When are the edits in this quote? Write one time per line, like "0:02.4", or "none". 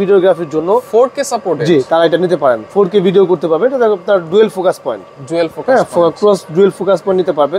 none